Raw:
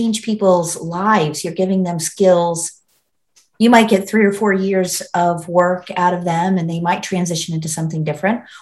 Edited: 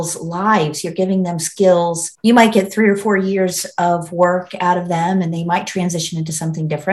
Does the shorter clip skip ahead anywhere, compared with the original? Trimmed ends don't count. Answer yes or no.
yes